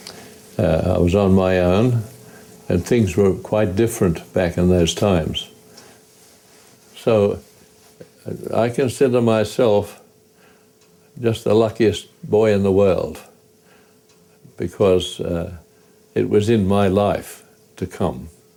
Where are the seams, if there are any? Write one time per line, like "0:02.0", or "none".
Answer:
none